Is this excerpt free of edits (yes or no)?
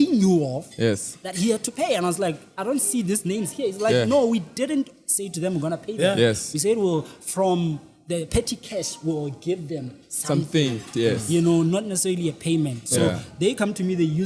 yes